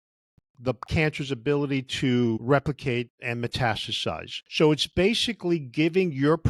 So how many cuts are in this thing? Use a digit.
1